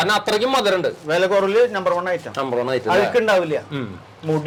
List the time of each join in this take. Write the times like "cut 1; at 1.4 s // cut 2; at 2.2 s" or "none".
none